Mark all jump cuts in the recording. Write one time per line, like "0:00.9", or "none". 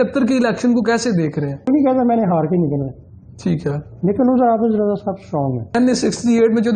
0:01.7
0:05.7